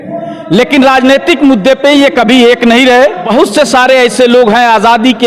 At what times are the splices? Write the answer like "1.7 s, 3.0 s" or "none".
3.2 s